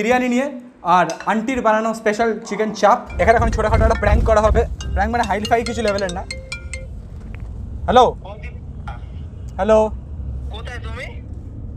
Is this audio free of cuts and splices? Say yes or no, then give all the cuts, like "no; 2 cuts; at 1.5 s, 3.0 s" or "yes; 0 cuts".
no; 1 cut; at 3.2 s